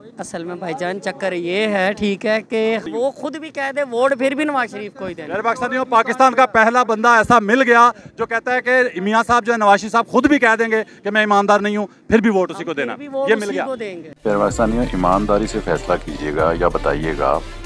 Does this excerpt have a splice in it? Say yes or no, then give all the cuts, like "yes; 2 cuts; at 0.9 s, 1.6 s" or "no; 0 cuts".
yes; 2 cuts; at 2.8 s, 14.0 s